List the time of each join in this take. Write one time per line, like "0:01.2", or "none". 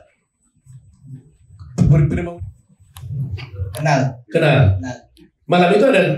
0:02.3